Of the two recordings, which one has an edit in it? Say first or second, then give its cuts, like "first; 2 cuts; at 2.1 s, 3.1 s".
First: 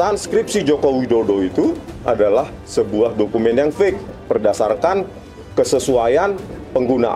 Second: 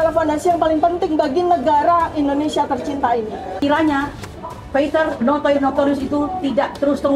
second; 1 cut; at 3.6 s